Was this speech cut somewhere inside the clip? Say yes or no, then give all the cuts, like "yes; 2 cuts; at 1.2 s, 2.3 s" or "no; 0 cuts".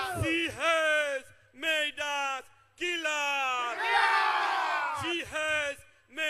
no; 0 cuts